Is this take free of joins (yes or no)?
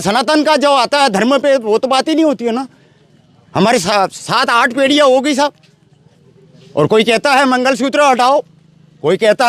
yes